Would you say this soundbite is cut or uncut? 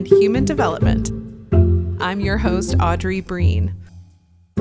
uncut